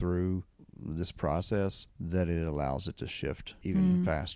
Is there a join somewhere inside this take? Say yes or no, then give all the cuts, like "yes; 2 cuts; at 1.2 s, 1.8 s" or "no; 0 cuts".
yes; 2 cuts; at 1.9 s, 3.5 s